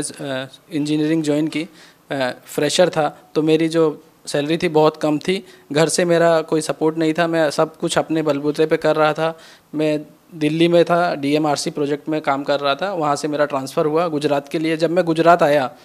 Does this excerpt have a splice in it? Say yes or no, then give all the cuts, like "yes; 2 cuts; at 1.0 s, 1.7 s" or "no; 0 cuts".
no; 0 cuts